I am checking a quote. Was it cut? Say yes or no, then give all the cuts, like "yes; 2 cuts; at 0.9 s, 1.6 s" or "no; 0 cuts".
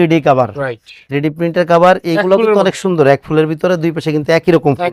no; 0 cuts